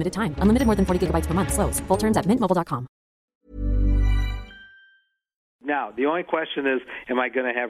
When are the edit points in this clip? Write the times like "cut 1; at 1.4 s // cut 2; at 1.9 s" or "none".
cut 1; at 3.4 s // cut 2; at 5.6 s